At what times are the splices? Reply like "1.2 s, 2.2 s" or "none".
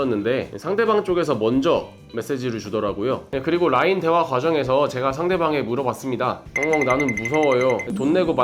3.2 s